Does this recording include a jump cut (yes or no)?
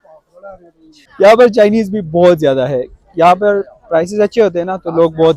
no